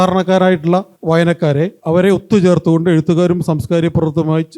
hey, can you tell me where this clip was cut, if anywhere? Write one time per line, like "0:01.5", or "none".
0:00.9
0:01.8